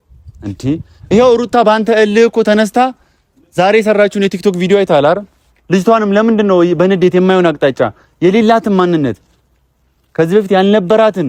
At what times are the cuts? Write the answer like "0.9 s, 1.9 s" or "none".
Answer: none